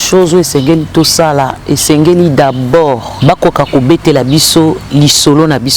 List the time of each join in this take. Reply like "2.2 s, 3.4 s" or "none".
3.1 s

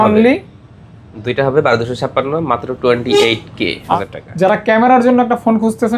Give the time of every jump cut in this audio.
4.0 s

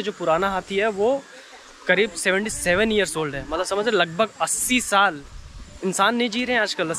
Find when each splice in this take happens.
none

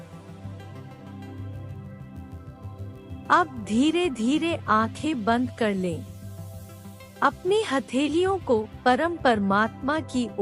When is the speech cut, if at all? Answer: 3.3 s

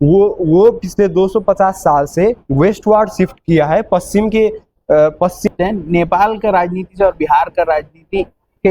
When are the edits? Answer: 5.5 s

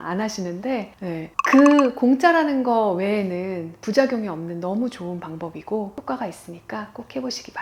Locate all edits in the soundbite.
none

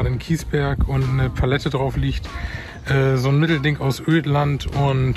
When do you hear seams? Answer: none

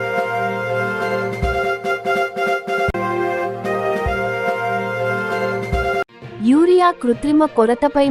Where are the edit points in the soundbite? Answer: 1.7 s, 2.9 s, 6.0 s

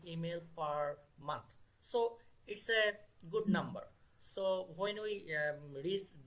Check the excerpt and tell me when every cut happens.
none

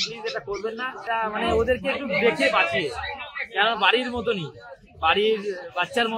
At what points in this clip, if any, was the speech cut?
1.0 s

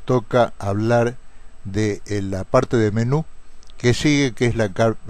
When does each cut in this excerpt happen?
1.9 s

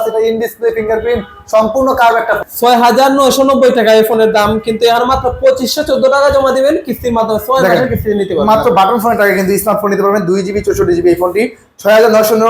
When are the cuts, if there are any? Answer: 2.5 s

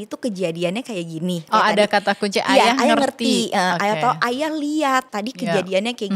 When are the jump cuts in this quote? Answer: 1.5 s, 5.1 s

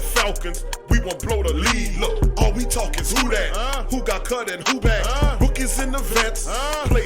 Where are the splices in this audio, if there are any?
none

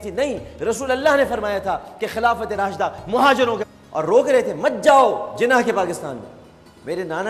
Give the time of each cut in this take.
none

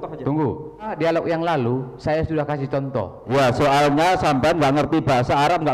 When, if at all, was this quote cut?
0.9 s, 3.2 s

